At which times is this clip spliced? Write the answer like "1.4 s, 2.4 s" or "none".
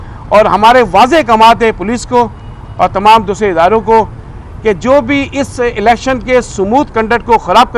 none

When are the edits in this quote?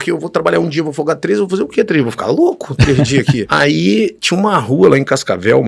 3.4 s

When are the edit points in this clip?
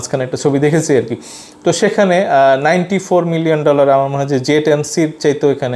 none

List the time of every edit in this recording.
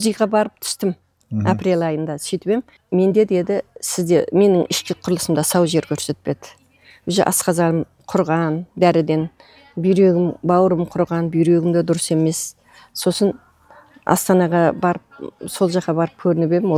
none

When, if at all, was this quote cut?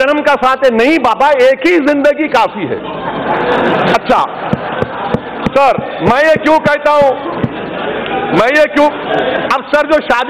none

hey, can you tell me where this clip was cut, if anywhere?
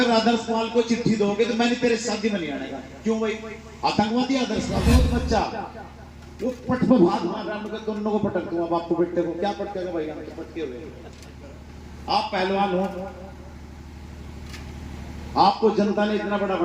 4.9 s

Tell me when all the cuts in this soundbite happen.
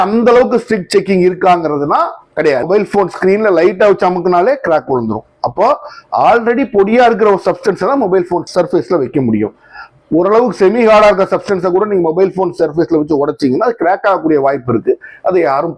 2.6 s

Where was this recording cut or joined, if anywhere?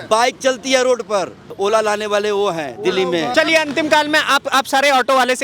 1.5 s, 3.3 s

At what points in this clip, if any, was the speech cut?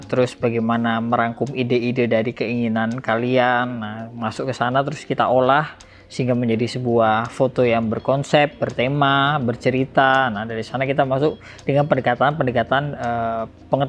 none

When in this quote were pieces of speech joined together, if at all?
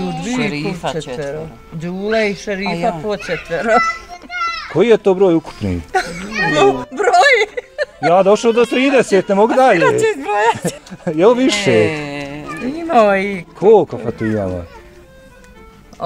10.7 s

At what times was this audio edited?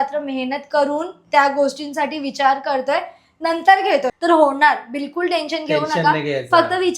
4.1 s

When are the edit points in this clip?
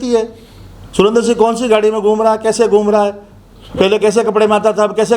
none

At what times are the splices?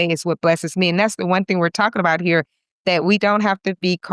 none

